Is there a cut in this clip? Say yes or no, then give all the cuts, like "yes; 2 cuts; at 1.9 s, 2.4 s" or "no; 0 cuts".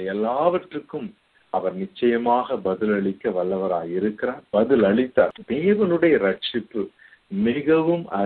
yes; 2 cuts; at 4.4 s, 5.4 s